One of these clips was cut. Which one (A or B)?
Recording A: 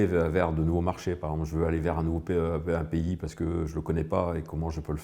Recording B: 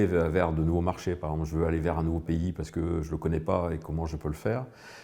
B